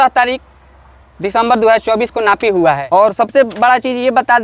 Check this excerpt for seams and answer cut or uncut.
cut